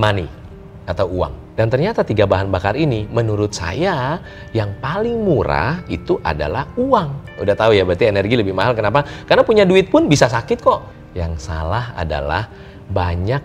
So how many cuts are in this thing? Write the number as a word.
three